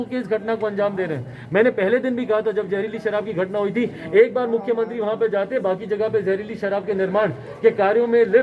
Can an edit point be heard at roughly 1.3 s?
no; 0 cuts

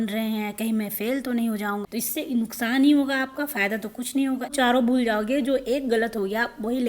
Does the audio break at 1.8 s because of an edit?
yes; 2 cuts; at 1.8 s, 4.5 s

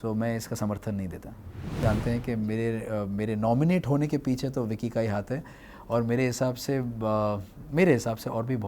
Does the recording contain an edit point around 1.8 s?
yes; 1 cut; at 1.8 s

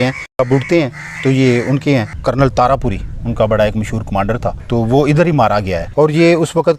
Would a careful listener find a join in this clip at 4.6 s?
yes; 3 cuts; at 2.2 s, 4.6 s, 5.8 s

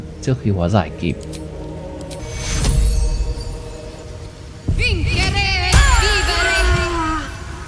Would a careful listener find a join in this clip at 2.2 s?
yes; 2 cuts; at 2.2 s, 4.0 s

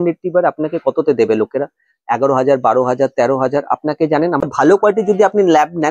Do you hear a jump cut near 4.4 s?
yes; 1 cut; at 4.4 s

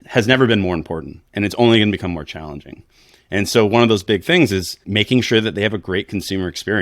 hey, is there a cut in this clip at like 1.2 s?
no; 1 cut; at 4.8 s

